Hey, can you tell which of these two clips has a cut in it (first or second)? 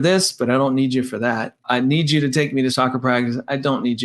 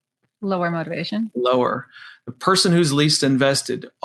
first